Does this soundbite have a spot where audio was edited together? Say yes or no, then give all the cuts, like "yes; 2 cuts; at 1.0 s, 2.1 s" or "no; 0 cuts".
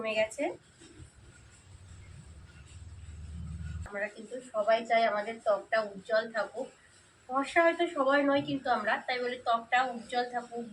yes; 1 cut; at 3.9 s